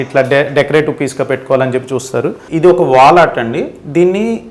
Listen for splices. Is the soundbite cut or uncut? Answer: cut